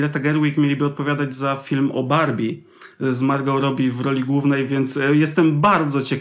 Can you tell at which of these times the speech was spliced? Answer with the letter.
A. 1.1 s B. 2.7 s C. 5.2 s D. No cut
D